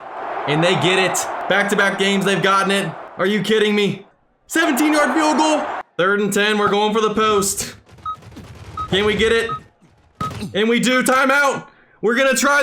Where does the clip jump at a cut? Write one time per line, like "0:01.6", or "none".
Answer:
0:01.3
0:03.0
0:04.1
0:05.8